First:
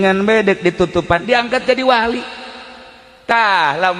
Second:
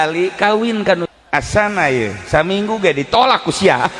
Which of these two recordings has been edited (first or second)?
second